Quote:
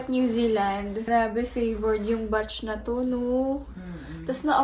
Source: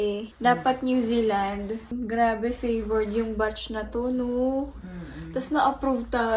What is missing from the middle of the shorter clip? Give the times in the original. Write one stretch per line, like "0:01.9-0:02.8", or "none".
0:01.8-0:02.1